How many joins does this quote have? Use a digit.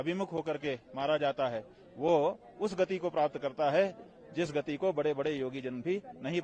0